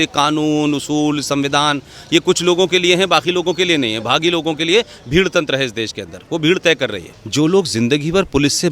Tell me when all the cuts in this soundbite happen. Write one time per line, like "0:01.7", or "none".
0:07.0